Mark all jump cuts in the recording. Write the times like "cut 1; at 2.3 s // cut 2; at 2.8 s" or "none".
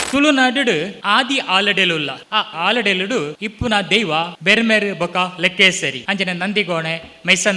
cut 1; at 0.9 s // cut 2; at 2.5 s // cut 3; at 3.4 s // cut 4; at 4.3 s // cut 5; at 6.0 s